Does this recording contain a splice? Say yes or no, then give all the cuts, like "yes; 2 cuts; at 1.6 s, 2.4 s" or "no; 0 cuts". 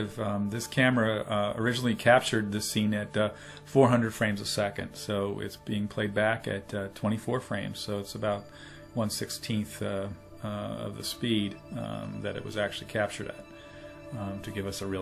yes; 1 cut; at 4.9 s